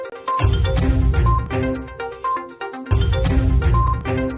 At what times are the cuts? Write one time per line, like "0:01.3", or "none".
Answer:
0:02.3